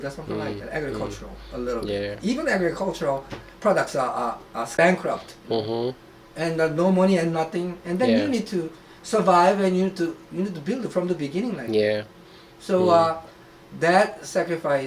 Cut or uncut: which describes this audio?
cut